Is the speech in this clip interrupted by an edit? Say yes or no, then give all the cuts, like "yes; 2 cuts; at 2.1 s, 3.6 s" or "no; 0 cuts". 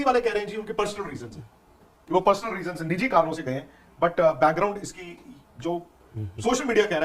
no; 0 cuts